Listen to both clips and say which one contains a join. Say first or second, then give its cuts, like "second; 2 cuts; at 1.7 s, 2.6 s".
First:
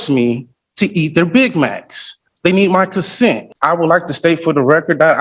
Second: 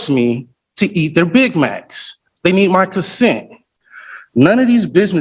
first; 1 cut; at 3.5 s